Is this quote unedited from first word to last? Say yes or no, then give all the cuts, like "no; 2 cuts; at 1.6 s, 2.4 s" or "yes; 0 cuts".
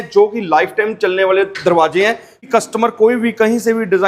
no; 1 cut; at 2.5 s